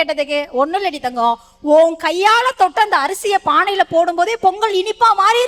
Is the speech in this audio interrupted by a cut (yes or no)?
no